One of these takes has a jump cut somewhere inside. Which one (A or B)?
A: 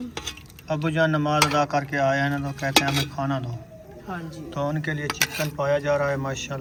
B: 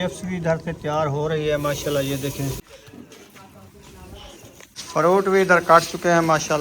B